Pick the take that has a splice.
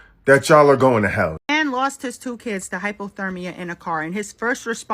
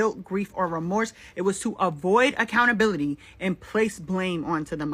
first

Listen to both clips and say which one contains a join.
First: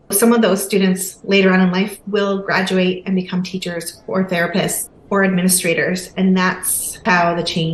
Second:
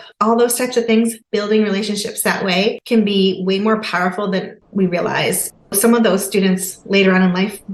second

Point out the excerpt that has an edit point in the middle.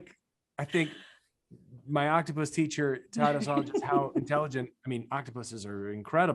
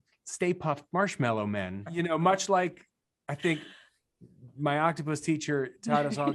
second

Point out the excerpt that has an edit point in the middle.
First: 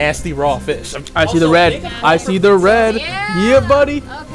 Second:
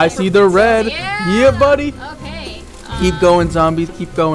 first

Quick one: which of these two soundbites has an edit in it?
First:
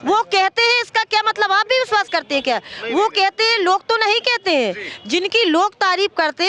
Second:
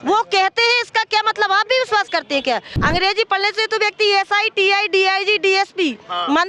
second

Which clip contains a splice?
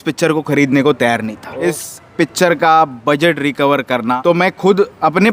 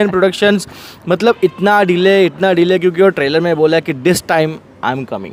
first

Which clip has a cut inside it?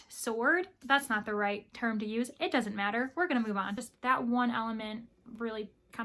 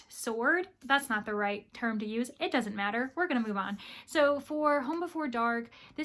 first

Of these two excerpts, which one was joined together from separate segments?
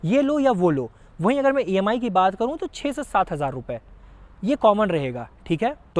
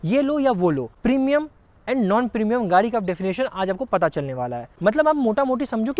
second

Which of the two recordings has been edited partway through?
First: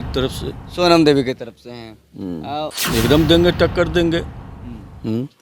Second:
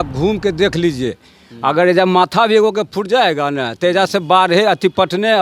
first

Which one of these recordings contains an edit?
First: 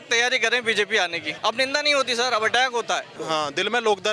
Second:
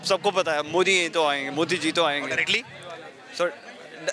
first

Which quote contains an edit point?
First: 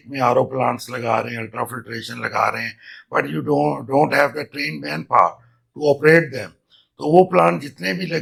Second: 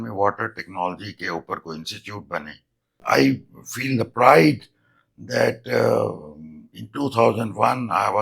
second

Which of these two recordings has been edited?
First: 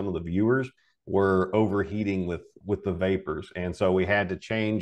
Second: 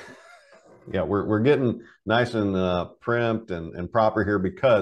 first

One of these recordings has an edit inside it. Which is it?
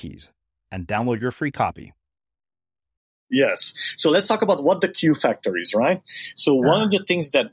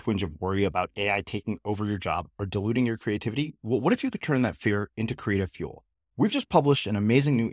first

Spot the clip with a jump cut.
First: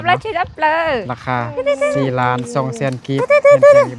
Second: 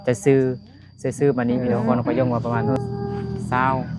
second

